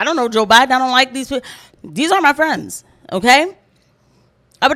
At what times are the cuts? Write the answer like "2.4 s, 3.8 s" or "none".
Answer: none

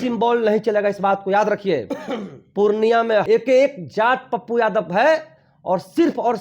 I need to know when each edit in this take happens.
3.2 s

